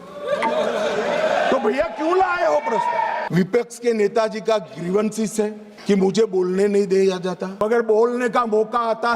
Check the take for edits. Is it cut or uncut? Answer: cut